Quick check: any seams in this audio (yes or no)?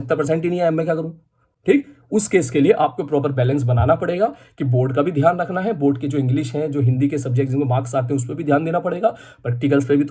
no